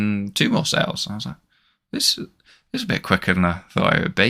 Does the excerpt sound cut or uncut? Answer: uncut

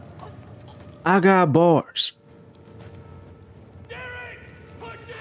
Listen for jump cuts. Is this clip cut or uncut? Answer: uncut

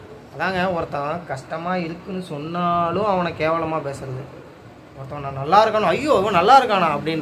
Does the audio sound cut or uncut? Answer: uncut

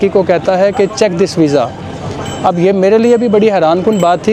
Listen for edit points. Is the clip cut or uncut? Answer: uncut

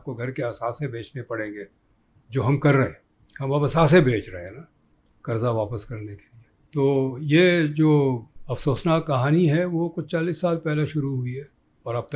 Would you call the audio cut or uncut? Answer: uncut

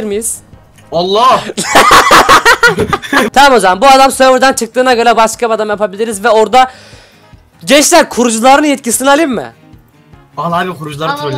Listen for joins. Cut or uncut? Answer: cut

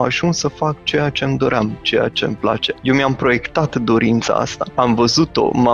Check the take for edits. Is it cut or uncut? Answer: cut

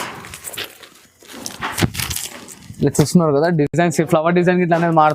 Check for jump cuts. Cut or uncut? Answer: uncut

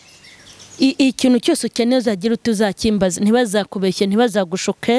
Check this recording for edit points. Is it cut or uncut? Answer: uncut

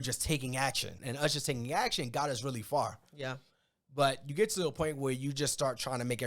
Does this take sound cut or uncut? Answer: cut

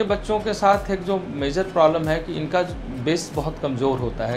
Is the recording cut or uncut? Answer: uncut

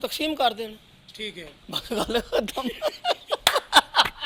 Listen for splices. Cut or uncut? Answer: uncut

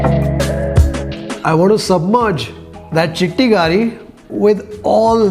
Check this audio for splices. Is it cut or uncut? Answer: cut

